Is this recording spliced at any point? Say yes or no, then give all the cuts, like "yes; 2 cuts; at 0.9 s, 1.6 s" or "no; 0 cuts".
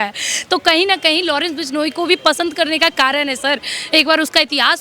no; 0 cuts